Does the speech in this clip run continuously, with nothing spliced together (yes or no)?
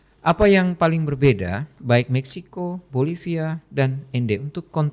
yes